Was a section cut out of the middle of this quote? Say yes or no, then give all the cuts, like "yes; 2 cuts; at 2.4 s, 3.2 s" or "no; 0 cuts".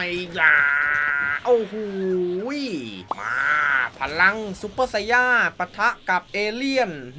yes; 2 cuts; at 3.0 s, 6.3 s